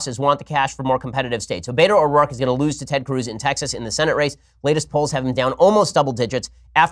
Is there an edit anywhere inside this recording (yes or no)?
yes